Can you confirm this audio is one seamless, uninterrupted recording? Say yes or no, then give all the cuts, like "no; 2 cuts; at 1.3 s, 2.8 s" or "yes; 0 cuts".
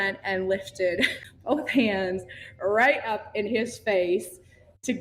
no; 1 cut; at 1.3 s